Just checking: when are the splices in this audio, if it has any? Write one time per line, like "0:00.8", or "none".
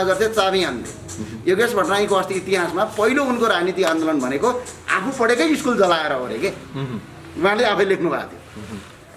none